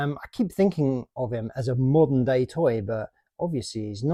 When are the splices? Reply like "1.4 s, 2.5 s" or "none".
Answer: none